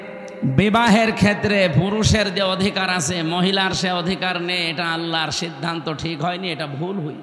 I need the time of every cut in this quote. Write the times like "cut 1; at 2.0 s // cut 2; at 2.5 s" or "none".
none